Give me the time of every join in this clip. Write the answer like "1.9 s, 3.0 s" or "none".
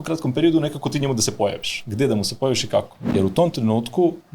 3.0 s